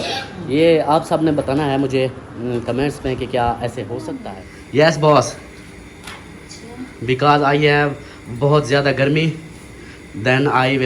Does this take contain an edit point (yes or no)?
yes